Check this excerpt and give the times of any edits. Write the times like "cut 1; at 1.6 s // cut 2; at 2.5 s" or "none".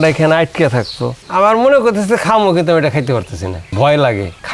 cut 1; at 1.2 s